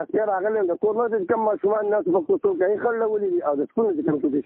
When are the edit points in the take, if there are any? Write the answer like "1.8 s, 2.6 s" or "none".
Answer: none